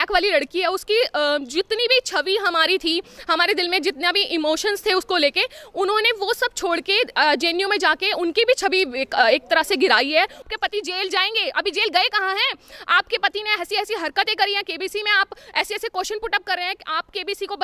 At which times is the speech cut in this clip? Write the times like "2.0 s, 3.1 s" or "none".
10.4 s

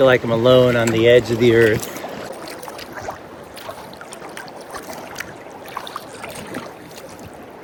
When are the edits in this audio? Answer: none

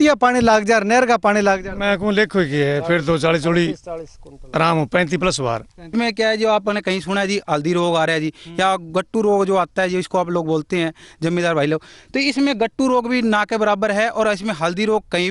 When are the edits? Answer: 5.9 s

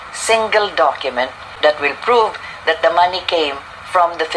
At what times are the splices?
1.5 s

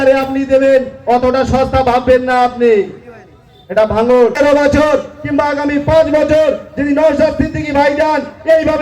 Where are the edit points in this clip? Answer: 4.4 s

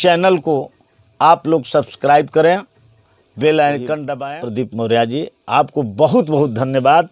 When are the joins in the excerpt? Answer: 4.1 s

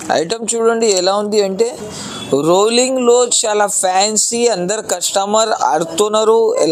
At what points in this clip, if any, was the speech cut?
none

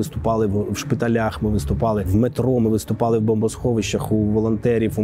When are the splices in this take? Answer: 2.1 s

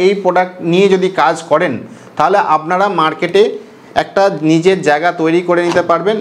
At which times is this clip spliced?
none

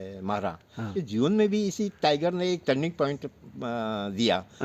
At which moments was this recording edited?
1.0 s

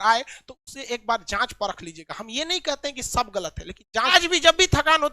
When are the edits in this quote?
4.1 s

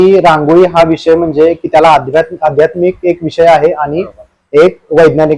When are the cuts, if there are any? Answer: none

